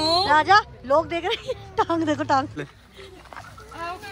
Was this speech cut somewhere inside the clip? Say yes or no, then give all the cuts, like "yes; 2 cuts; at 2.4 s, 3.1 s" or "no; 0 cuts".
yes; 1 cut; at 2.6 s